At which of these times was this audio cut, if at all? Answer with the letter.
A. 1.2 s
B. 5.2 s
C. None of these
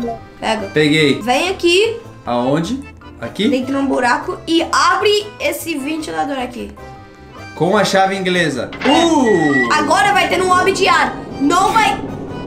A